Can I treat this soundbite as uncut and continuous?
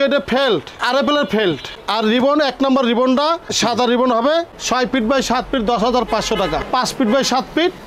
yes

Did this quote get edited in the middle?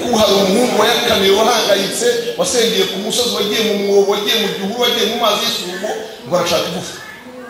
no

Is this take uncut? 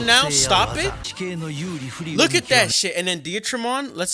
no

